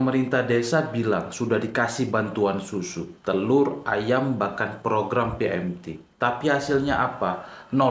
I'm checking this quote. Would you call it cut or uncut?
uncut